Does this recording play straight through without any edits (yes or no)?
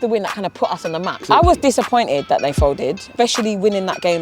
no